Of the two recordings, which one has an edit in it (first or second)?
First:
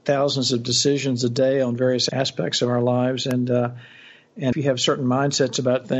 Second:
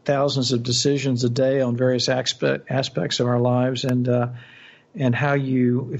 first